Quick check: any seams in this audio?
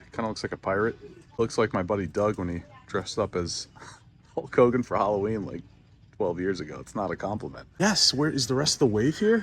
yes; 2 cuts; at 1.4 s, 7.7 s

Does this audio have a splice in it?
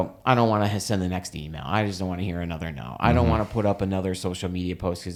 no; 0 cuts

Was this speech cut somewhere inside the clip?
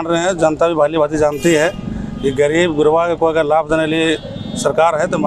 no; 0 cuts

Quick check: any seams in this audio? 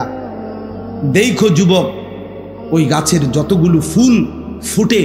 no; 0 cuts

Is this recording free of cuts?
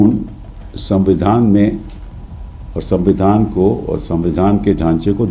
yes; 0 cuts

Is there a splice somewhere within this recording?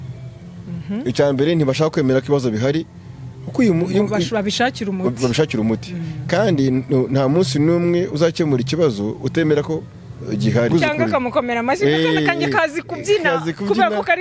yes; 1 cut; at 10.7 s

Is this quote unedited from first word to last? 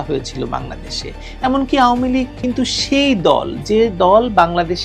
yes; 0 cuts

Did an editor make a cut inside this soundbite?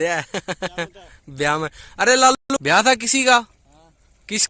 yes; 1 cut; at 2.4 s

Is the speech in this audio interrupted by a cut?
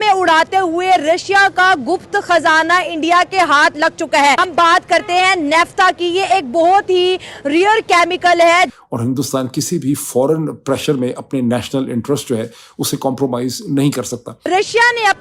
yes; 3 cuts; at 4.4 s, 8.8 s, 14.3 s

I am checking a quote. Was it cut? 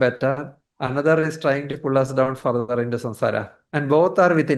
yes; 1 cut; at 3.6 s

